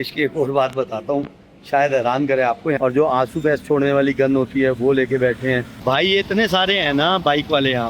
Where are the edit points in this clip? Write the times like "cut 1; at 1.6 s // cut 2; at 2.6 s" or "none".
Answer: cut 1; at 2.8 s // cut 2; at 5.7 s